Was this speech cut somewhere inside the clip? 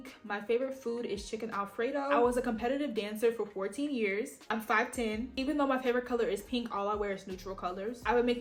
no; 0 cuts

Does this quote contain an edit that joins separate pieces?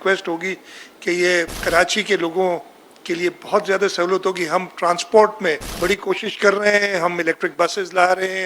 yes; 2 cuts; at 1.5 s, 5.7 s

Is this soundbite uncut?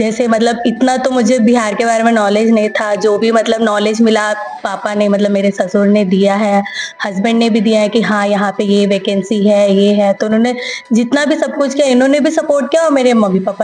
yes; 0 cuts

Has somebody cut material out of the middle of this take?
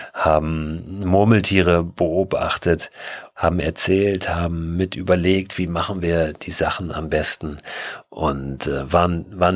no; 0 cuts

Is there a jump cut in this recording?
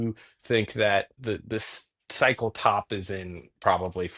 yes; 1 cut; at 1.2 s

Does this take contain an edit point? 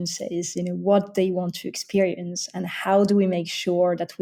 no; 0 cuts

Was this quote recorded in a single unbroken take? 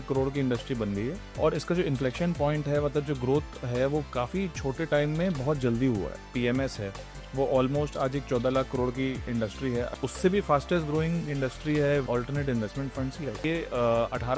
no; 5 cuts; at 1.4 s, 6.3 s, 9.9 s, 12.1 s, 13.4 s

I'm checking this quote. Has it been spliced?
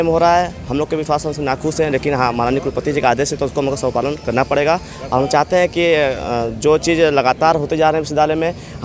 no; 0 cuts

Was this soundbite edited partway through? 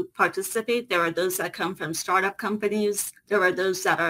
yes; 1 cut; at 3.1 s

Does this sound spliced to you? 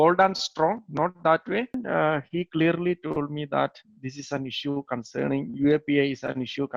yes; 1 cut; at 1.8 s

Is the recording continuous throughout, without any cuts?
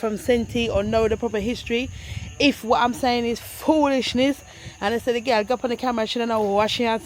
yes; 0 cuts

